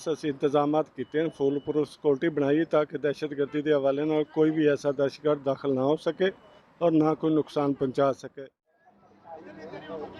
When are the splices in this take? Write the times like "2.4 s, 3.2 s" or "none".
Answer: 8.3 s